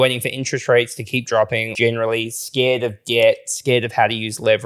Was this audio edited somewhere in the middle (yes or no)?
yes